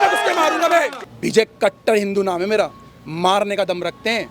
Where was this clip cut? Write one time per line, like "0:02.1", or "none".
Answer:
0:01.0